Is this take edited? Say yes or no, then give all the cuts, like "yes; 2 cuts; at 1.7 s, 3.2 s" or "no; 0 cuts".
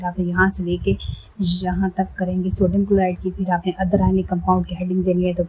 no; 0 cuts